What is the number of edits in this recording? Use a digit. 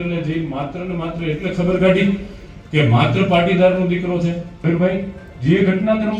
1